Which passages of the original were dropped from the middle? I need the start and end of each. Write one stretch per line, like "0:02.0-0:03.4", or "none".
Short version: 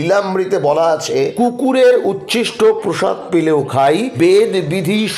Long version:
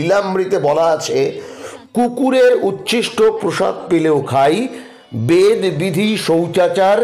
0:01.3-0:01.9
0:04.7-0:05.2